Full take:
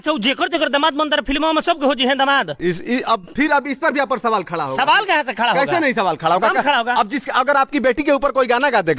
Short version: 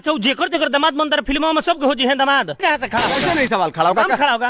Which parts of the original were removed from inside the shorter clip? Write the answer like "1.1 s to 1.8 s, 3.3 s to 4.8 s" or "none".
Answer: 2.6 s to 5.0 s